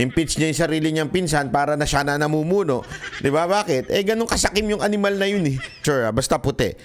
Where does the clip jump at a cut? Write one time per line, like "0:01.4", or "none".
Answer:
0:05.8

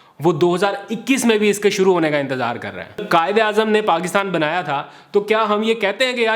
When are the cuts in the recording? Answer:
0:03.0

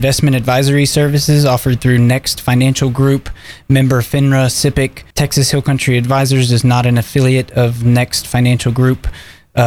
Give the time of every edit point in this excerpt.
0:05.0

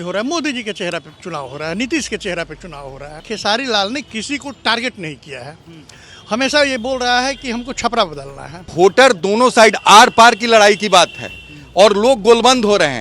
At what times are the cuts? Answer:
0:03.2
0:08.7

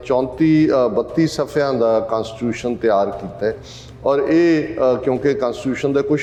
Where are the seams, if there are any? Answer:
none

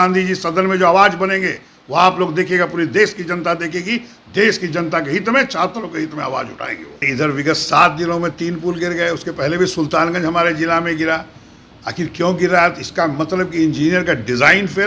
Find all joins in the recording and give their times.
0:07.1

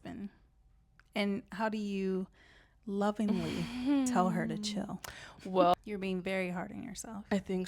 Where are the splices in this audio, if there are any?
0:05.7

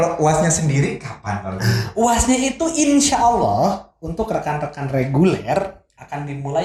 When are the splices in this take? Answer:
none

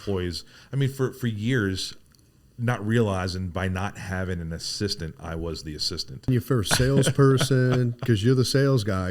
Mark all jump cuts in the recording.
0:06.3

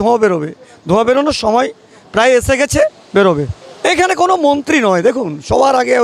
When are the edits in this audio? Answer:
none

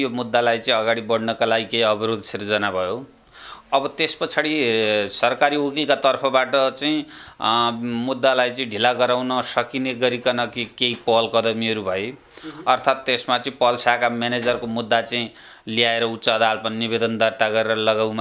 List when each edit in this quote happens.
none

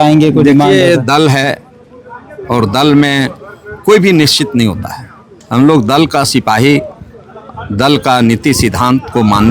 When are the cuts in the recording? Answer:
none

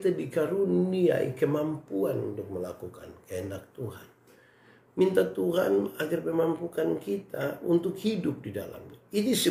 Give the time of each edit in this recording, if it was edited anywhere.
none

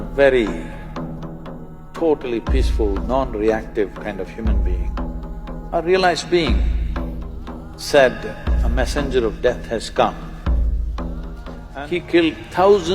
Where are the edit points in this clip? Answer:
0:11.6

